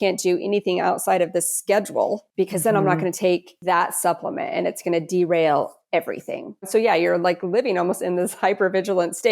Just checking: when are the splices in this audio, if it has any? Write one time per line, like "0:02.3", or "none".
0:02.3
0:03.5
0:06.7